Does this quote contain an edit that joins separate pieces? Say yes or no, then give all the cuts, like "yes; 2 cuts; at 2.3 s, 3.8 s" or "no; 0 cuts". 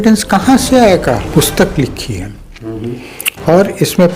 yes; 1 cut; at 1.3 s